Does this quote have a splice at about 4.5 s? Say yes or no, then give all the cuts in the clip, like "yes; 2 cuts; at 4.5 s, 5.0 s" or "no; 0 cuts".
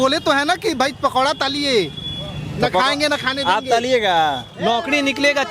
yes; 1 cut; at 4.5 s